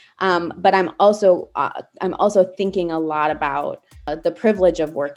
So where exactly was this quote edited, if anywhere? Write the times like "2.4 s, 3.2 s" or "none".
4.1 s